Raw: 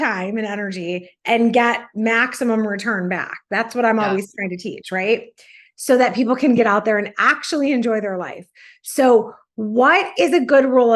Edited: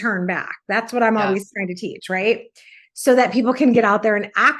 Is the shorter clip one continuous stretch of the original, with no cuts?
yes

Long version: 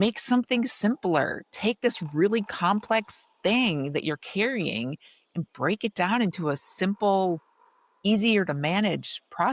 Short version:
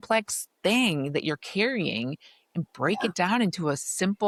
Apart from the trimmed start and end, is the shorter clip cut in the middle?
no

